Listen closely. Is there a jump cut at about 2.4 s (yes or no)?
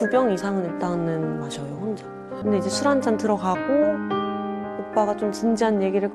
yes